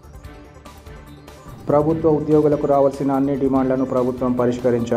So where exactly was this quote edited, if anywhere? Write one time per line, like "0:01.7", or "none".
none